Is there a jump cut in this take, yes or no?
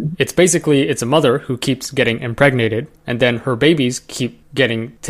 no